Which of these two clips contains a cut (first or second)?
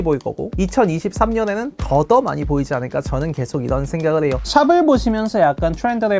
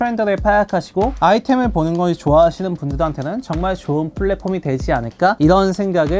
first